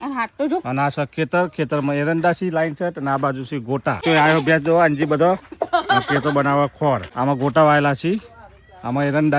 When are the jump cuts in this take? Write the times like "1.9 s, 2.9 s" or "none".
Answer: 4.0 s, 7.1 s

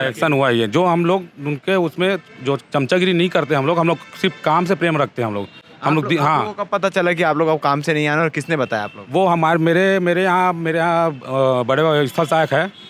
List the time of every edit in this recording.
none

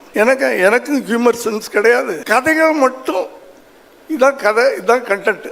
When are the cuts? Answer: 2.2 s

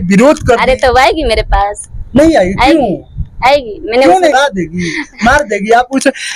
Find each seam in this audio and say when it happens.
4.3 s

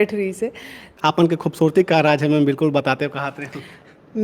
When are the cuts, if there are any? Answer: 1.0 s

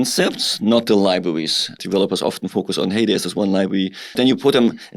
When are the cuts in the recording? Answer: 1.7 s, 4.2 s

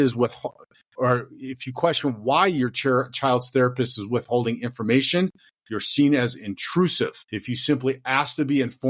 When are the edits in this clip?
7.3 s

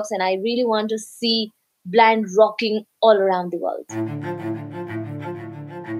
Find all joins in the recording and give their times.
3.8 s

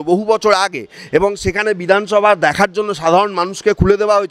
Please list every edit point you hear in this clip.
none

